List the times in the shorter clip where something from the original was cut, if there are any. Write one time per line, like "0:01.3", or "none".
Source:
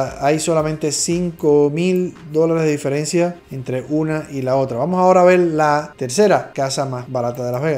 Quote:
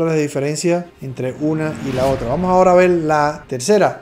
none